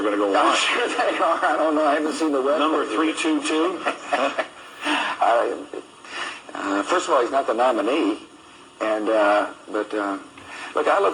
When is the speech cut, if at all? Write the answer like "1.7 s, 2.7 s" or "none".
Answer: none